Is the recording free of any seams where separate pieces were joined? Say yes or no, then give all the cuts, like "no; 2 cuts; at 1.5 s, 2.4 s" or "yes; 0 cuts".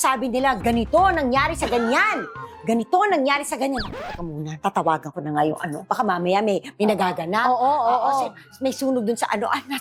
yes; 0 cuts